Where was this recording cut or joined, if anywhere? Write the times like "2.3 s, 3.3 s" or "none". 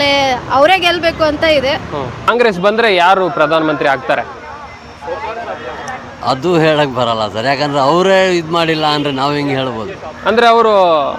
2.3 s